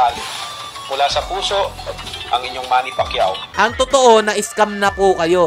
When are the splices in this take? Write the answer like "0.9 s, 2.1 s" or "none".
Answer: 3.5 s